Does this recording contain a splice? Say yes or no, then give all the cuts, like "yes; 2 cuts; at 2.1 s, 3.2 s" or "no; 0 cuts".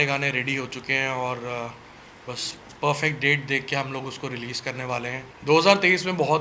yes; 1 cut; at 5.3 s